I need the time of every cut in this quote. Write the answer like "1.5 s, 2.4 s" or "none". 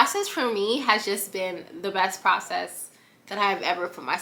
none